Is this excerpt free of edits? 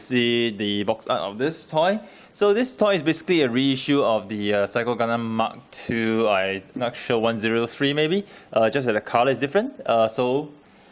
no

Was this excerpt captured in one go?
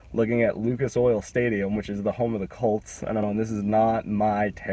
no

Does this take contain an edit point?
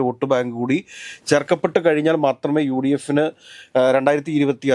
no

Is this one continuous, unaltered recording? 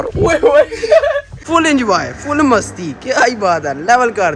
no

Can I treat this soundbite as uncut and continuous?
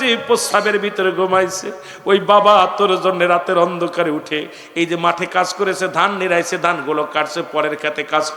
yes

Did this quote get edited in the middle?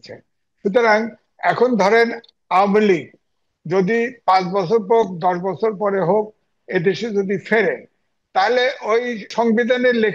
yes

